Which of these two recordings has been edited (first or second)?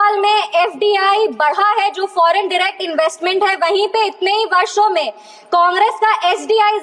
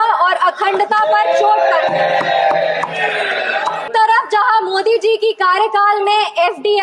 second